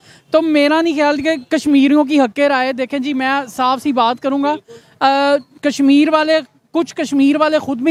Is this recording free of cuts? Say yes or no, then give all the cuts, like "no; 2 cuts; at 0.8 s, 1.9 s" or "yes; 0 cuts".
yes; 0 cuts